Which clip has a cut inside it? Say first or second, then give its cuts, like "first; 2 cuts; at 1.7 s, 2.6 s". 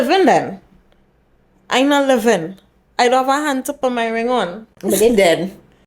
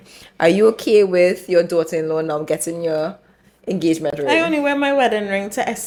first; 1 cut; at 4.7 s